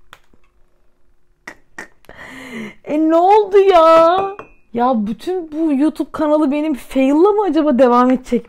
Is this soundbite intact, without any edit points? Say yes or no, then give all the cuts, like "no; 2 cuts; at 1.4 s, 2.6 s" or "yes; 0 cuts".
yes; 0 cuts